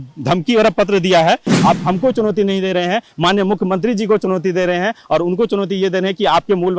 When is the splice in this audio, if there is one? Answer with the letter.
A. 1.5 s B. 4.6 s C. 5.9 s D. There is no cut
A